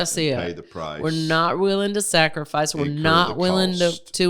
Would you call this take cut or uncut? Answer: uncut